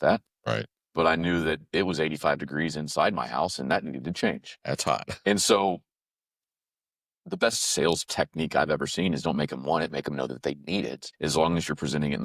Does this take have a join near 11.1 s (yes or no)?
yes